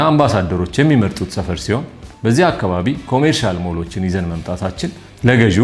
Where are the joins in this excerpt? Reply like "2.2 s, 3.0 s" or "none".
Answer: none